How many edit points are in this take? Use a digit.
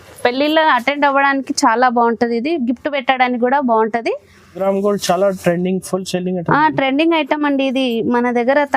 1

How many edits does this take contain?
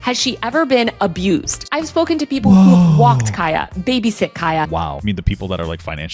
2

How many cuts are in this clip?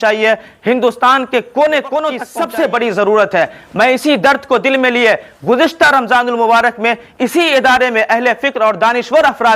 1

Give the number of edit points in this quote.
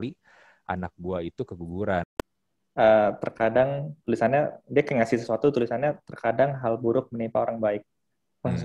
1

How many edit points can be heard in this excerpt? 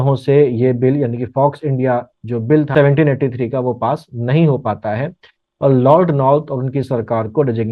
1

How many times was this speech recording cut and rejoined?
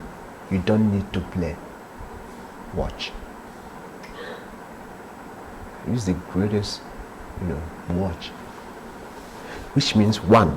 0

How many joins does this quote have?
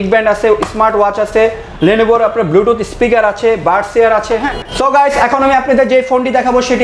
1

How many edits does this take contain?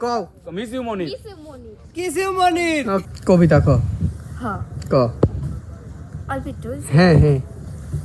1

